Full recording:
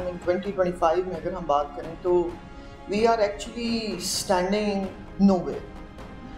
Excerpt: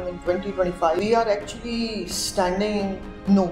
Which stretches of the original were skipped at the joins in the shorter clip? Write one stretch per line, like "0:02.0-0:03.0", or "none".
0:01.0-0:02.9

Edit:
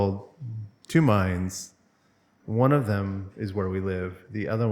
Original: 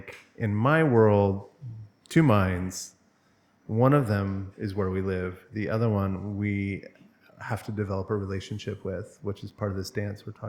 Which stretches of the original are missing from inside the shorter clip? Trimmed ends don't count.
none

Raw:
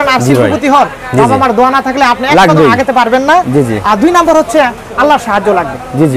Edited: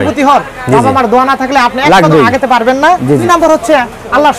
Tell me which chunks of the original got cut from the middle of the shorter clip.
0:03.7-0:04.1

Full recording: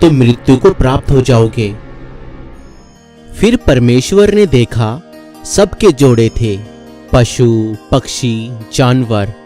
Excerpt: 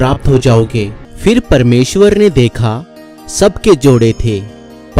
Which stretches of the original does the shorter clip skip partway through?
0:01.9-0:03.2

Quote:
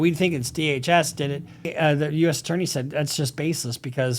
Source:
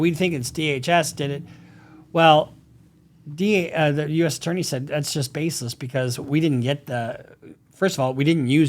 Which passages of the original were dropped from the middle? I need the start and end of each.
0:01.7-0:03.7

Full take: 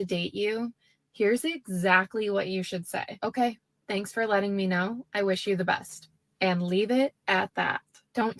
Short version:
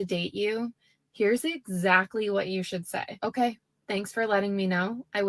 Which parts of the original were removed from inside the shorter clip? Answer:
none

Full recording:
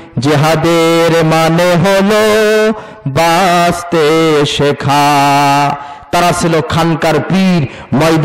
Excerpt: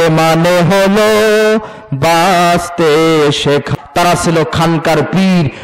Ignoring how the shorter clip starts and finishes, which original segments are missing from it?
0:04.8-0:05.9

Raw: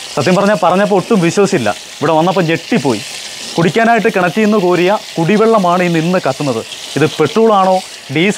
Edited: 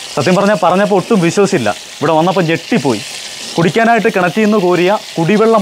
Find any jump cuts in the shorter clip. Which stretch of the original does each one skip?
none

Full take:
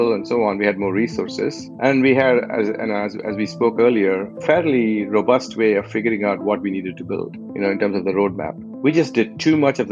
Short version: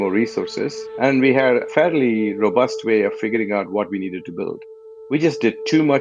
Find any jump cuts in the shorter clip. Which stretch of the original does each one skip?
0:02.5-0:04.4
0:07.5-0:08.5

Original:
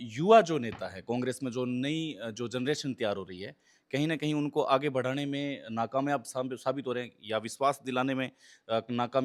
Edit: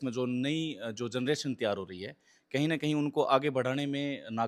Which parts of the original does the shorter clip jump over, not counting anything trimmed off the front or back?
none

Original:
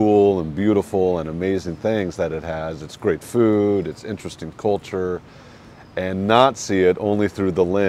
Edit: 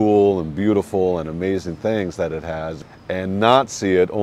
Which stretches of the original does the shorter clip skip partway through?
0:02.8-0:05.7

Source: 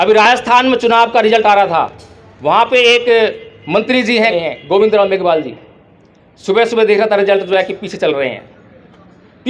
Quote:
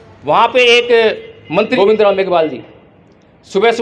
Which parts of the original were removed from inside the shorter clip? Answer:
0:03.9-0:04.6

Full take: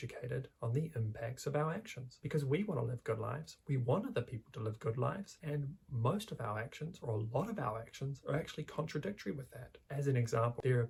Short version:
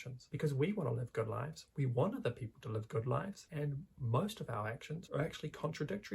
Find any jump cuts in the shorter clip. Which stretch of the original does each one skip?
0:06.9-0:08.2

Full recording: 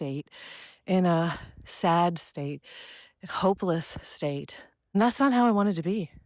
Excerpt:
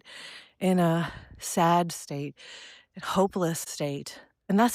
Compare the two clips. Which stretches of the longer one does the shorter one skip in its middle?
0:03.9-0:04.1

